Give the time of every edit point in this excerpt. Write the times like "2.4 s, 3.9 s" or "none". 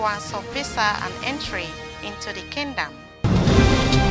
3.0 s